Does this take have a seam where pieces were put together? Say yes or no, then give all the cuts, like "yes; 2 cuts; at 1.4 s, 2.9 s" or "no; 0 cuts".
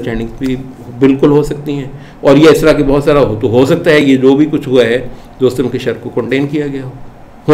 no; 0 cuts